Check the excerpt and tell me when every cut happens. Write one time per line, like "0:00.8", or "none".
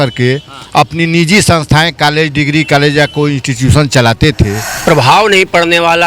0:04.6